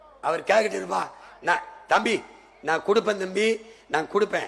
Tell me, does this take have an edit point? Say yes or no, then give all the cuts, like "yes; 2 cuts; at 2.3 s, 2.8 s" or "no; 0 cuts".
no; 0 cuts